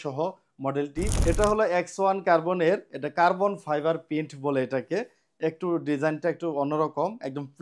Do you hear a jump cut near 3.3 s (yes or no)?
no